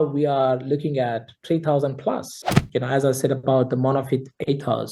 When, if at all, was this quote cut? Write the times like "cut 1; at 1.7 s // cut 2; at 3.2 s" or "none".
cut 1; at 2.6 s